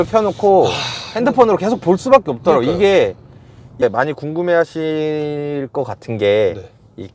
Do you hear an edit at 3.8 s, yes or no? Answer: yes